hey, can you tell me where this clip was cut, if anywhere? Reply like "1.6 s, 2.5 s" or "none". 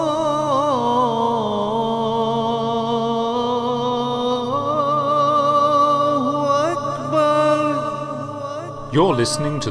none